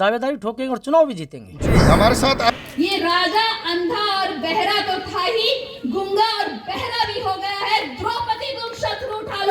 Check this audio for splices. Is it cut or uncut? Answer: cut